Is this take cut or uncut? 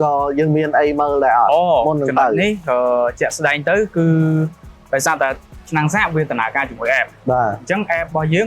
uncut